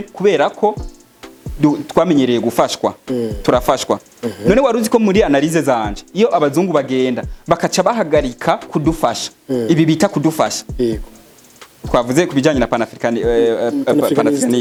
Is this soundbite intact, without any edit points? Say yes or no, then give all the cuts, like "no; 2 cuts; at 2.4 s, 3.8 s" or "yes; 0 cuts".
yes; 0 cuts